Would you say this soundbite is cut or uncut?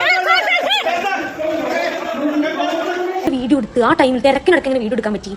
cut